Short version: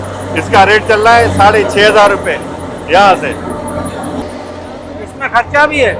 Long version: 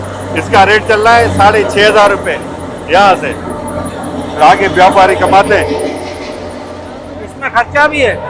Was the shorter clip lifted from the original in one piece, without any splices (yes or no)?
no